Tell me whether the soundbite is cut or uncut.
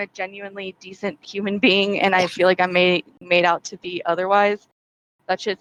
uncut